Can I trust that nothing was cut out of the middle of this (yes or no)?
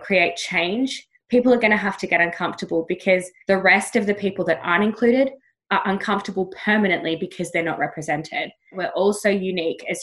no